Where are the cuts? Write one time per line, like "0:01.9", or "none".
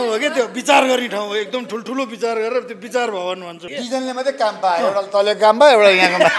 0:03.6